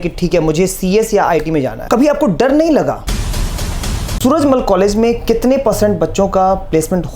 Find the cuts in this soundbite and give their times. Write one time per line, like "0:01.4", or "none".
0:01.8
0:03.6